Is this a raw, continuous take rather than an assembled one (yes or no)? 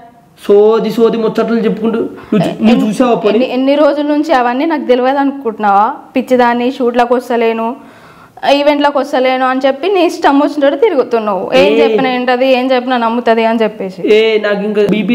yes